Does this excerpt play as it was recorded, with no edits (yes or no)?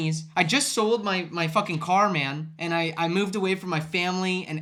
yes